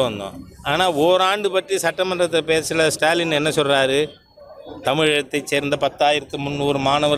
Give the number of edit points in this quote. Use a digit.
0